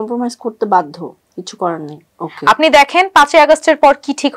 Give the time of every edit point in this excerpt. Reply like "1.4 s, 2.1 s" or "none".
2.0 s